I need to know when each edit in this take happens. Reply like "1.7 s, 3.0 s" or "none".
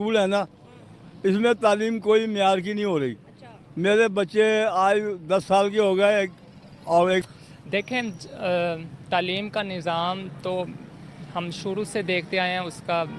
7.3 s